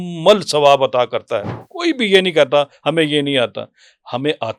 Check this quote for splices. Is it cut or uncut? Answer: cut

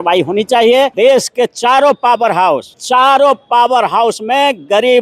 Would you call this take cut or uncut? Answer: cut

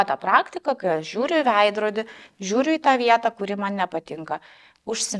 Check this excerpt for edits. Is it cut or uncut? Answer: uncut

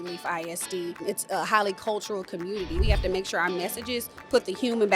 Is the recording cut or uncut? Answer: cut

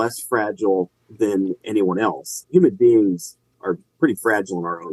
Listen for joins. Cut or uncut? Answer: cut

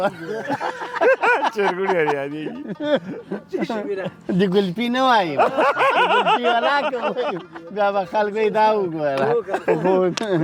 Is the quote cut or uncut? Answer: uncut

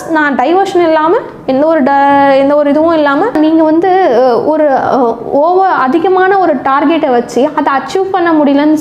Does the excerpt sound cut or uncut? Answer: cut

